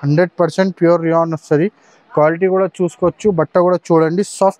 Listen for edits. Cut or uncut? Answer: uncut